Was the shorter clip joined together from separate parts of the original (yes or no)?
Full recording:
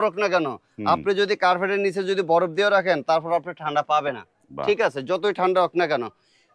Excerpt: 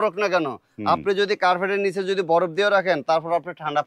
no